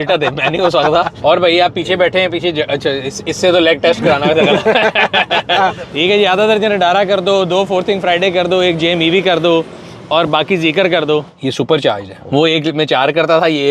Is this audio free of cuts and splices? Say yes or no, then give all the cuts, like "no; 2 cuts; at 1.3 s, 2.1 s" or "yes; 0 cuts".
no; 4 cuts; at 1.1 s, 5.8 s, 11.3 s, 12.1 s